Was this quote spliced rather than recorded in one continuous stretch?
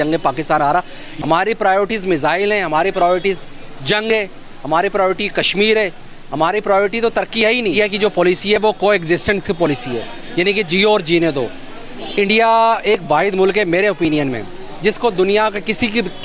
yes; 2 cuts; at 1.1 s, 7.8 s

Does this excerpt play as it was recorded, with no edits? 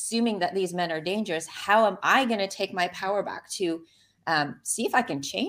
yes; 0 cuts

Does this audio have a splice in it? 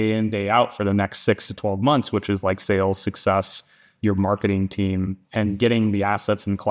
no; 0 cuts

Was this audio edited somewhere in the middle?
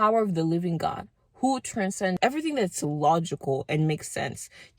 yes; 1 cut; at 2.1 s

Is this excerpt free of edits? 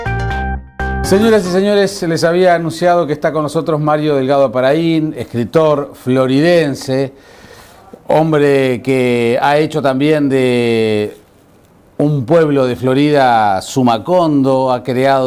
no; 1 cut; at 1.0 s

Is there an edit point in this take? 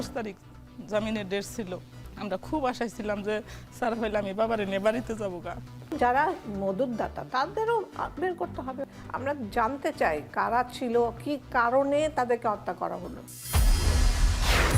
yes; 3 cuts; at 5.9 s, 8.8 s, 13.4 s

